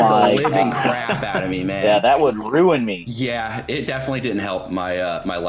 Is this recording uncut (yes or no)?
no